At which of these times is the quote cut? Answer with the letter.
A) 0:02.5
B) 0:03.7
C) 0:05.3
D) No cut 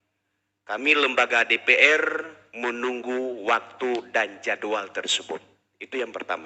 D